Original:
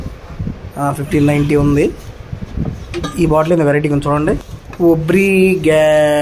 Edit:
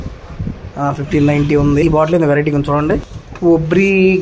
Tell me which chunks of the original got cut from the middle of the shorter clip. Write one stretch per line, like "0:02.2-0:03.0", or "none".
0:01.8-0:03.2